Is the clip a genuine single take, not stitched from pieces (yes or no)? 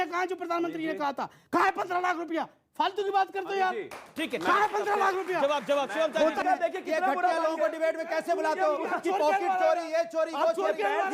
no